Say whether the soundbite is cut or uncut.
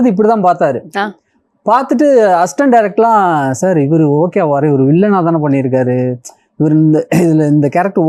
uncut